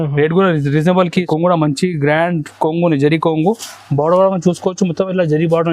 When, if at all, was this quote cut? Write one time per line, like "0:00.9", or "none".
0:01.1

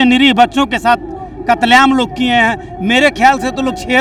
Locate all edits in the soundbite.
none

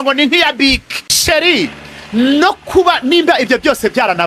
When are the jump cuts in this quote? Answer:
0:01.1

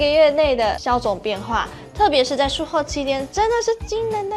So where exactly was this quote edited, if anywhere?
none

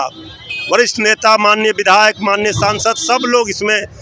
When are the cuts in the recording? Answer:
none

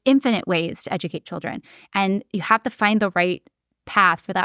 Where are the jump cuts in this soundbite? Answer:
none

